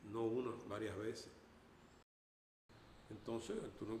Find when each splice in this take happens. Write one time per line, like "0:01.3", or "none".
0:02.3